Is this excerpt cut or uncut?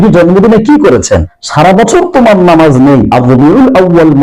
cut